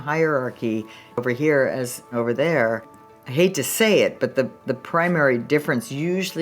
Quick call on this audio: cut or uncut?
cut